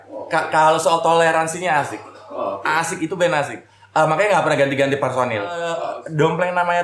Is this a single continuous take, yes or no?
no